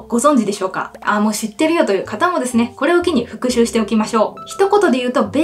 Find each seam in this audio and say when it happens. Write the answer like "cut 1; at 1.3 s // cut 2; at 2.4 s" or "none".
none